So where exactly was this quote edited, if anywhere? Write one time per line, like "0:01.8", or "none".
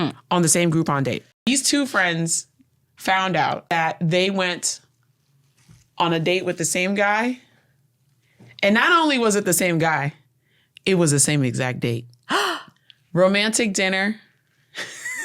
0:01.4
0:03.7